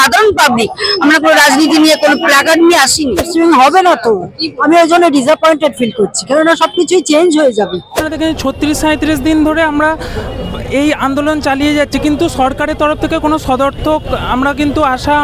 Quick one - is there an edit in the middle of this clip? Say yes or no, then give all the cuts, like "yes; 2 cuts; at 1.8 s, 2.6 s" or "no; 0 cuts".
yes; 2 cuts; at 3.3 s, 8.0 s